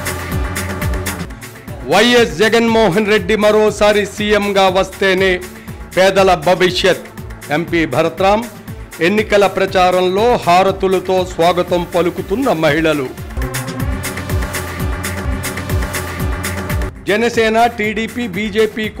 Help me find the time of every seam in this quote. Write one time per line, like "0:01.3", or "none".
0:01.0